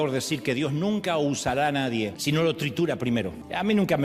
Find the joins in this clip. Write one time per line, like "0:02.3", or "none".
0:02.2